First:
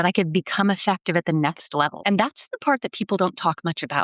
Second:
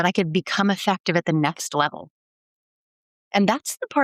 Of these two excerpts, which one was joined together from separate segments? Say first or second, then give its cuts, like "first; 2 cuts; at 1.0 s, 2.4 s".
first; 1 cut; at 2.0 s